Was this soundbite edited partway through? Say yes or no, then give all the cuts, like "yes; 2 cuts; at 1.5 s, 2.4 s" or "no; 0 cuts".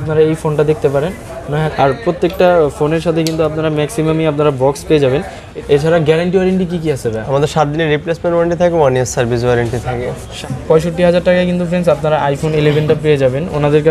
yes; 3 cuts; at 1.6 s, 5.4 s, 10.4 s